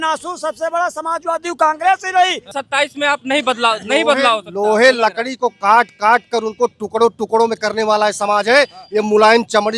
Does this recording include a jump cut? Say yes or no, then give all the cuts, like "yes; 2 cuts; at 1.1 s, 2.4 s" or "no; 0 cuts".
yes; 1 cut; at 2.5 s